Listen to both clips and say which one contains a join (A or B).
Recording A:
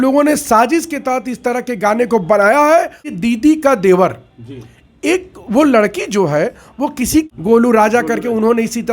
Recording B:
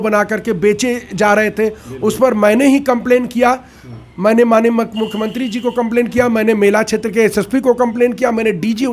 A